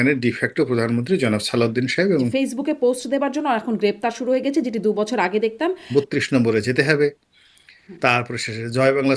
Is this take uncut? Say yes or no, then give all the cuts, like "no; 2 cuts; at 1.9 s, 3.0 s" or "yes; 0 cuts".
no; 2 cuts; at 2.3 s, 5.8 s